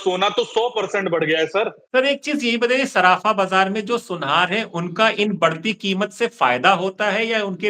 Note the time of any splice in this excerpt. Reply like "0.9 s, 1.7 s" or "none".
1.8 s

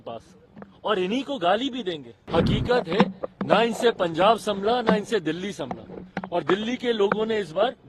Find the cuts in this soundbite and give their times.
2.1 s

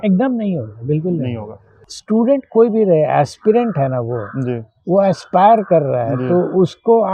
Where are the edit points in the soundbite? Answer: 1.9 s

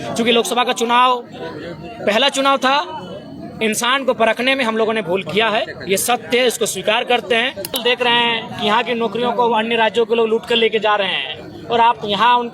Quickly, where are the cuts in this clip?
7.8 s

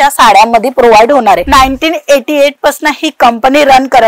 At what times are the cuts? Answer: 1.4 s

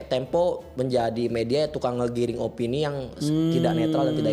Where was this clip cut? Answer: none

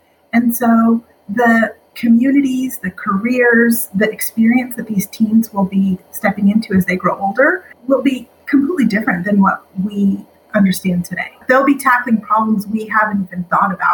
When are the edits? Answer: 1.9 s, 7.7 s, 11.4 s

